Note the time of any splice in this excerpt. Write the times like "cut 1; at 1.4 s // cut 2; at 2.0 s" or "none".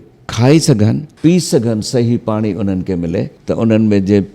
cut 1; at 1.1 s // cut 2; at 3.4 s